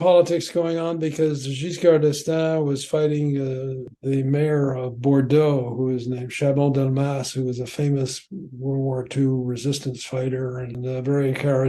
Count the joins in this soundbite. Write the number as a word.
two